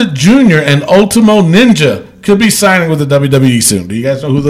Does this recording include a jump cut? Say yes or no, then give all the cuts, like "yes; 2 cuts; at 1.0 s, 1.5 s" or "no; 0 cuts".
no; 0 cuts